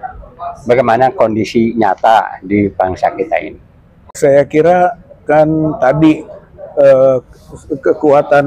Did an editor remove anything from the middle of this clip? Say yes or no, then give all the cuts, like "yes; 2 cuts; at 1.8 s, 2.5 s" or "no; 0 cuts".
yes; 1 cut; at 4.2 s